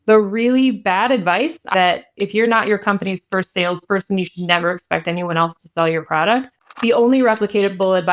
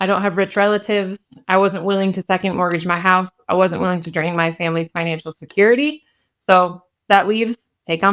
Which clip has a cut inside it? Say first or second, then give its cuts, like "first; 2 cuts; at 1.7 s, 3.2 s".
first; 2 cuts; at 1.6 s, 6.6 s